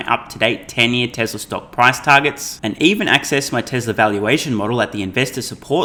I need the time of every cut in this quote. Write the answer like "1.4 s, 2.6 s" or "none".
none